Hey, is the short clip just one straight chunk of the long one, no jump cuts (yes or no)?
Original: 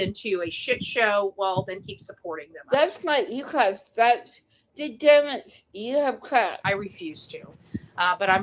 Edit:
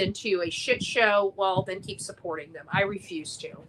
no